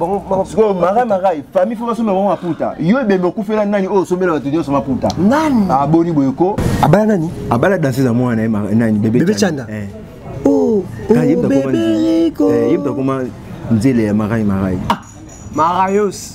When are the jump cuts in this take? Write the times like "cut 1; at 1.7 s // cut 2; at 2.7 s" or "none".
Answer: cut 1; at 6.6 s // cut 2; at 15.0 s